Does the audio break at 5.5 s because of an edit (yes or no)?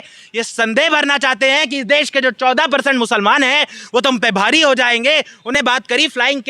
yes